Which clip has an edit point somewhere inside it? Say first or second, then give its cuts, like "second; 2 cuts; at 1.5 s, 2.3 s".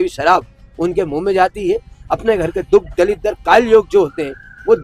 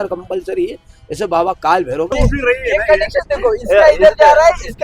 second; 1 cut; at 2.1 s